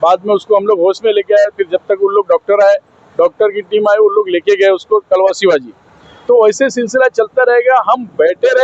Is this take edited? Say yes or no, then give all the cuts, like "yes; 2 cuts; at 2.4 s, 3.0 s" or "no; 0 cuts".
no; 0 cuts